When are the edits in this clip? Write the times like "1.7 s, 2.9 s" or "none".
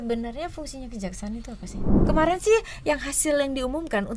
2.0 s